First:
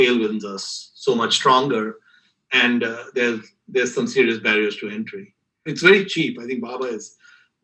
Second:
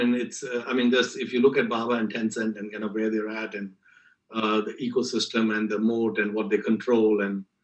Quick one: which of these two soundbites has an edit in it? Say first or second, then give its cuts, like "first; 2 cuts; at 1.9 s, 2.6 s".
first; 1 cut; at 5.6 s